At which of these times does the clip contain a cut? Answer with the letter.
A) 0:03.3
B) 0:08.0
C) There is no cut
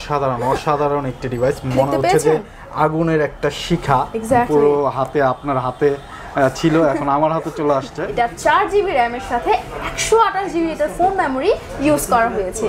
B